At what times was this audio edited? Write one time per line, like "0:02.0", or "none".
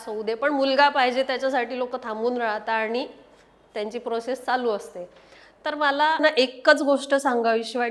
0:06.2

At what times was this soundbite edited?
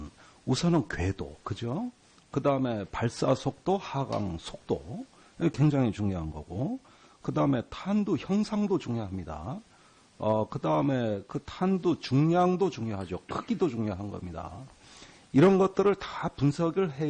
0:16.0

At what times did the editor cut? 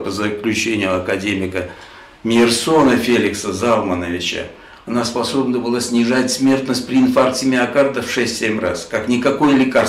none

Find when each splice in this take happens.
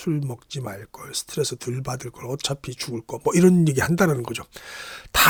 none

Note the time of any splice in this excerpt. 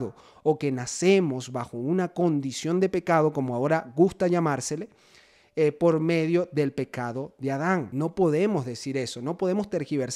0:07.9

